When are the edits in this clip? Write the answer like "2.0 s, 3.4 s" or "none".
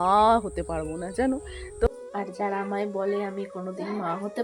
1.9 s